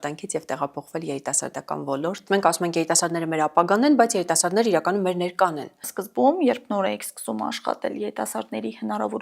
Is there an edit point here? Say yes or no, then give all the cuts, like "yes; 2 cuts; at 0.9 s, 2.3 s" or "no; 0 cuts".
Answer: yes; 2 cuts; at 2.2 s, 5.8 s